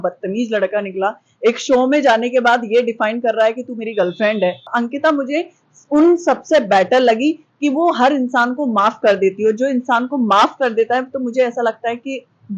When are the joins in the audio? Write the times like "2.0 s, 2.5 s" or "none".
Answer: 4.6 s